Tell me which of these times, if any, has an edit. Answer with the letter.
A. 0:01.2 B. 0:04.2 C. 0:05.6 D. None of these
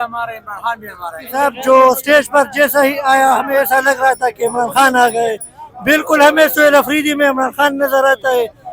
A